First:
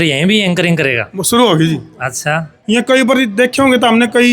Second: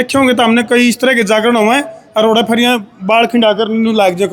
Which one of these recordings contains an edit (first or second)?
first